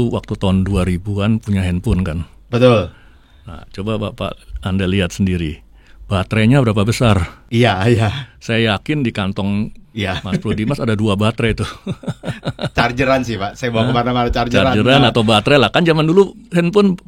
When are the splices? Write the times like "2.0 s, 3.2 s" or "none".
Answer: 7.4 s, 9.8 s